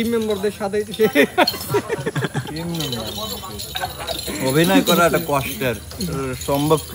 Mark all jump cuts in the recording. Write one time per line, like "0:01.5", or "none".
none